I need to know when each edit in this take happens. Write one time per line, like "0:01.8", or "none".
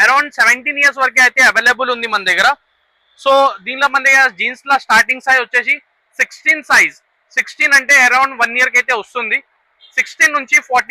none